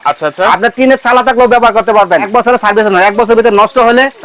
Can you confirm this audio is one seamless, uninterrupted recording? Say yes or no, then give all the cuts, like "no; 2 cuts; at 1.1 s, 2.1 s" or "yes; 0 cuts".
no; 1 cut; at 2.3 s